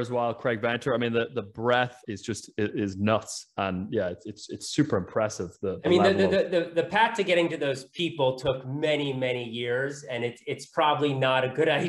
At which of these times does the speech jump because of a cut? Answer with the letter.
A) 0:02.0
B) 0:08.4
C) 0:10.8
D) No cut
A